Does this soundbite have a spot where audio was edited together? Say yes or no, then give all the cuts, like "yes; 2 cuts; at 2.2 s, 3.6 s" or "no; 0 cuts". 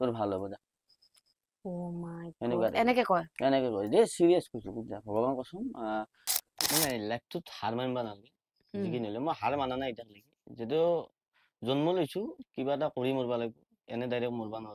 yes; 1 cut; at 6.5 s